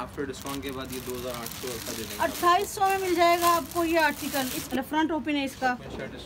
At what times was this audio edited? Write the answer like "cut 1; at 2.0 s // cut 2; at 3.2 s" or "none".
cut 1; at 4.7 s

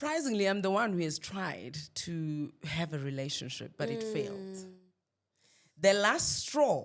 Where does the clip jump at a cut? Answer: none

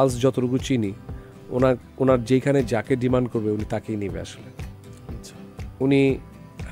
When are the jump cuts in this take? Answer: none

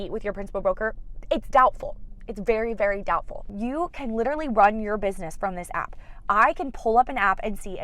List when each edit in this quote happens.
cut 1; at 3.4 s

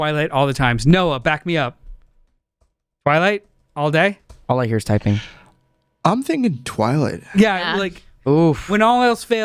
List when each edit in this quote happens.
none

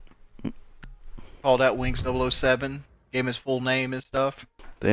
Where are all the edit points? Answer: cut 1; at 4.0 s

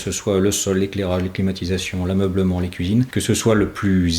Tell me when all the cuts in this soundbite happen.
cut 1; at 3.1 s

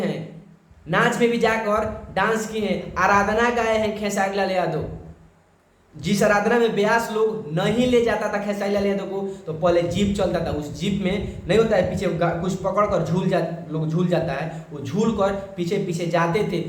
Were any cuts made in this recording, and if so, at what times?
none

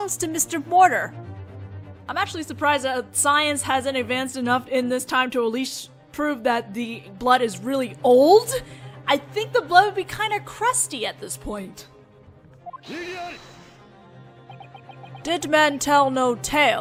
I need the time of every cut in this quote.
none

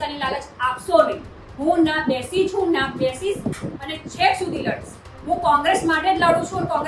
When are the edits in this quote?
none

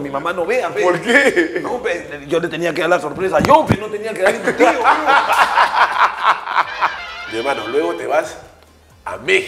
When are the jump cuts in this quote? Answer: none

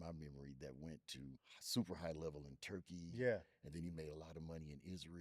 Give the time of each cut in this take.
cut 1; at 1.5 s

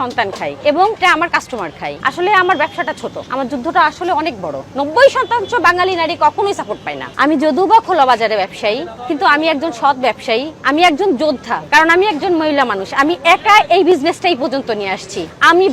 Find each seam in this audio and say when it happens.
cut 1; at 2.0 s // cut 2; at 4.6 s // cut 3; at 7.0 s // cut 4; at 11.5 s

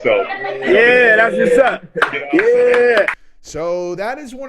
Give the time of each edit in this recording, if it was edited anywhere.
cut 1; at 3.2 s

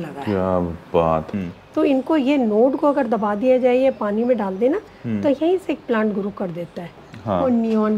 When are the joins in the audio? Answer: cut 1; at 1.3 s // cut 2; at 7.1 s

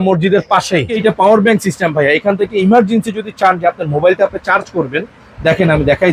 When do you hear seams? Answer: cut 1; at 1.0 s

